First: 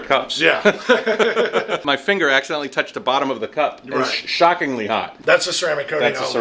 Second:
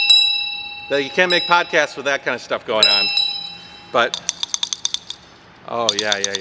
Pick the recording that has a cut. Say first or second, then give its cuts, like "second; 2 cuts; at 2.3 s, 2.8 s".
first; 2 cuts; at 1.8 s, 5.1 s